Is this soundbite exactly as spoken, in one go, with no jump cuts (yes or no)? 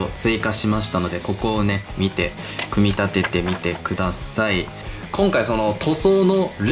no